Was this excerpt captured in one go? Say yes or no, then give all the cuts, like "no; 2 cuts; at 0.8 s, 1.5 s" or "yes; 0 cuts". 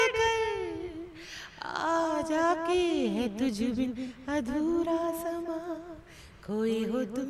yes; 0 cuts